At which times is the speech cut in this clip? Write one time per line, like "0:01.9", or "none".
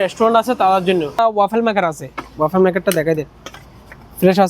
0:01.2